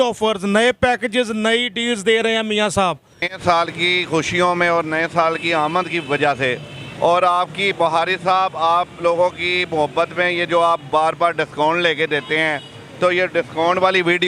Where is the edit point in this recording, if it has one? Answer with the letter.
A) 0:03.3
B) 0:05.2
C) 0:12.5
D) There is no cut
A